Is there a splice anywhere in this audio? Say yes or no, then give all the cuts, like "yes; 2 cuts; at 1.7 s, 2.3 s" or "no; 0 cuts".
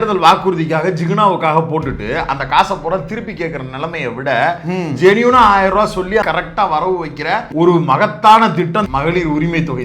yes; 3 cuts; at 6.2 s, 7.5 s, 8.9 s